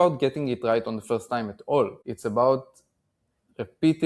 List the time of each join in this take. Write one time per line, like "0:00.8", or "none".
0:02.1